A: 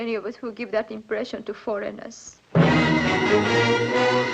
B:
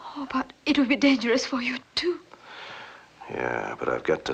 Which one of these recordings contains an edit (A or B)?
A